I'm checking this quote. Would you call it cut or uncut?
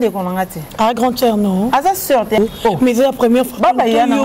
cut